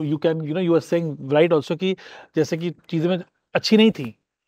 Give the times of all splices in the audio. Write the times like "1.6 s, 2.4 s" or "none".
none